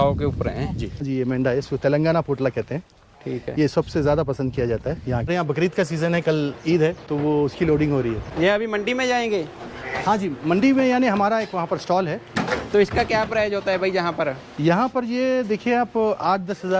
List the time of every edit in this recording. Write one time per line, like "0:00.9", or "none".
0:01.1
0:05.3
0:07.0
0:08.3
0:12.4